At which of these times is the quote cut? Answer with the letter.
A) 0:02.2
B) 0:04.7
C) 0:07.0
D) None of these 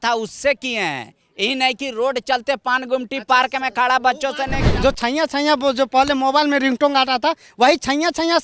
B